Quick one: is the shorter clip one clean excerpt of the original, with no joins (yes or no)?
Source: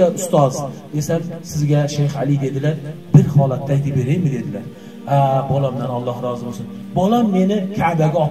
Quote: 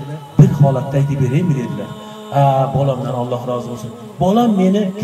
yes